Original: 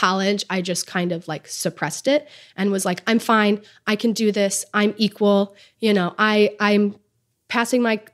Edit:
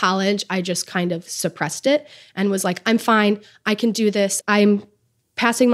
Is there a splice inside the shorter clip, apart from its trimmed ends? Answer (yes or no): yes